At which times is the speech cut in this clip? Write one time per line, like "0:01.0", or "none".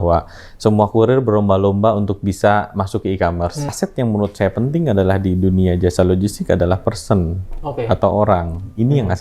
0:03.7